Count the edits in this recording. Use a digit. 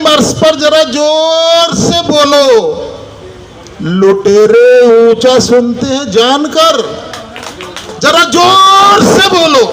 0